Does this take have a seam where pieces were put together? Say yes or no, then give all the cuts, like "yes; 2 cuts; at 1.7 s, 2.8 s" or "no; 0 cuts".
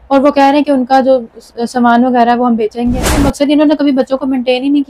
yes; 1 cut; at 3.2 s